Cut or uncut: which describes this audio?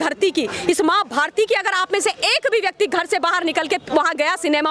uncut